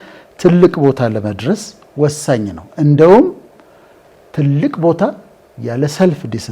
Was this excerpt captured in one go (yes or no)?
yes